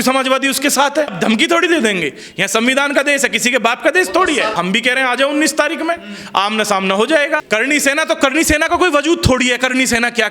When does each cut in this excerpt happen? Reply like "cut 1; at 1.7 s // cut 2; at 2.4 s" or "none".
cut 1; at 1.1 s // cut 2; at 4.6 s // cut 3; at 7.4 s